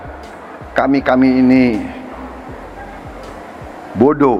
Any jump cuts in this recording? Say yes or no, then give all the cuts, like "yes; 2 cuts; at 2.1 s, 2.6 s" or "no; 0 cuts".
no; 0 cuts